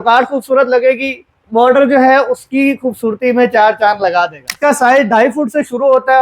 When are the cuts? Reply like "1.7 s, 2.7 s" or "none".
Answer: 4.5 s